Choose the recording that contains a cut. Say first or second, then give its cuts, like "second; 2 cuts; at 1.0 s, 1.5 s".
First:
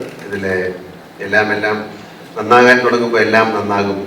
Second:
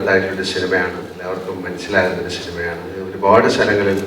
second; 2 cuts; at 1.1 s, 3.1 s